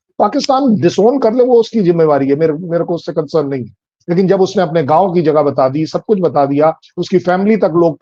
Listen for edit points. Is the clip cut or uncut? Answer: uncut